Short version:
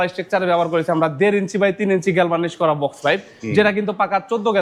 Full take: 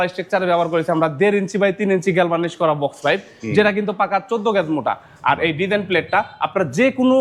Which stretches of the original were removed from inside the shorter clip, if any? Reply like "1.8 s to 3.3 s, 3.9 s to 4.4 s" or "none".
none

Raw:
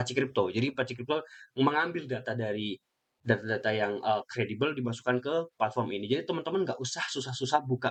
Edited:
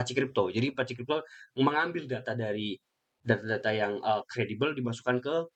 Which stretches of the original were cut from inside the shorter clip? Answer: none

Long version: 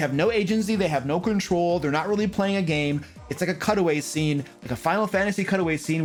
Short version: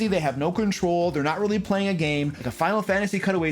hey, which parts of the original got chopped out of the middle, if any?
3.1 s to 4.7 s

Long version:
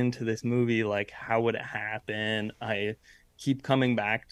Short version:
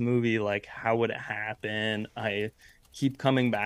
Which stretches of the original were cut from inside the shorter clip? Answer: none

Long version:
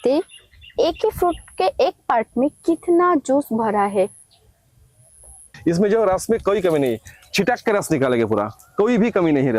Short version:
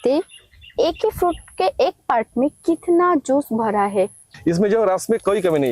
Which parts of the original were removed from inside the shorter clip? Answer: 4.3 s to 5.5 s

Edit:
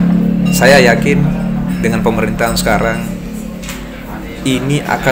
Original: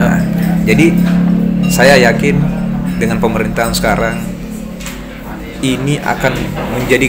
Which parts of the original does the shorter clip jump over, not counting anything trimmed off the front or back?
none

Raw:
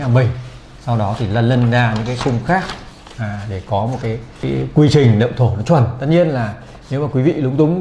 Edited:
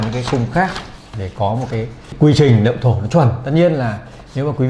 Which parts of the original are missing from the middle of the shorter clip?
3.0 s to 3.4 s, 4.4 s to 4.7 s

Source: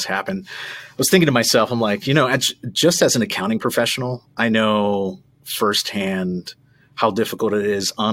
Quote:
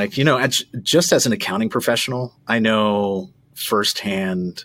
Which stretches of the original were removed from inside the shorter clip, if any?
none

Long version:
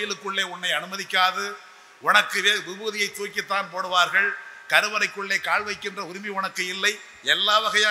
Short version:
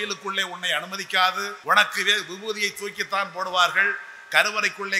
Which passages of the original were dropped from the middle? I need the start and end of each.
1.5 s to 1.9 s

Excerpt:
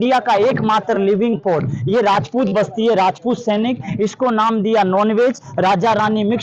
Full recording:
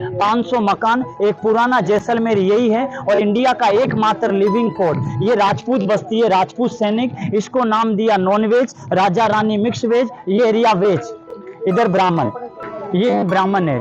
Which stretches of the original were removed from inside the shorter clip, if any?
none

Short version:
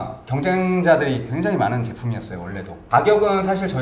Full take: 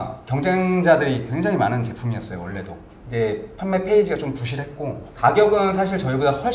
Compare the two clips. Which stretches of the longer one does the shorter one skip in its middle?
2.7 s to 5.0 s

